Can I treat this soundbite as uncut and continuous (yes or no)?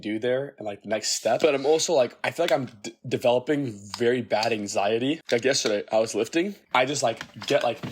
no